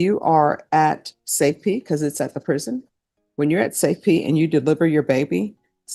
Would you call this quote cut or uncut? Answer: uncut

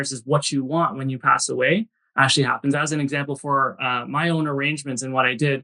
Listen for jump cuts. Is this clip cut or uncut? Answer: uncut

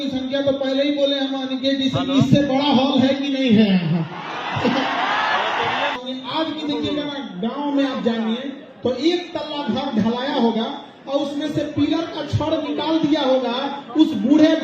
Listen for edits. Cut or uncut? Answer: cut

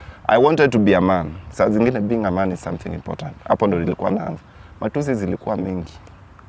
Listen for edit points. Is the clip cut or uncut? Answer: uncut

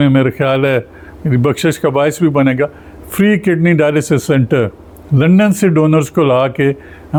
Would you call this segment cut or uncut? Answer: uncut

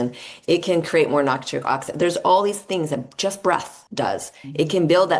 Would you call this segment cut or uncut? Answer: cut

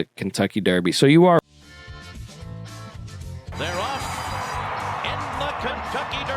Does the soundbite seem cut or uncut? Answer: cut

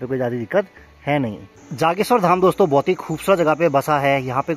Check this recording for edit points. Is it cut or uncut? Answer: cut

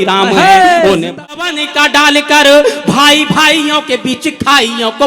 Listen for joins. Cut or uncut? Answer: cut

